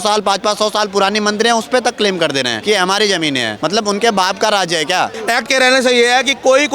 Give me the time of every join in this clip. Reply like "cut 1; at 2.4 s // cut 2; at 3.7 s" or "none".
cut 1; at 2.5 s // cut 2; at 3.5 s // cut 3; at 5.2 s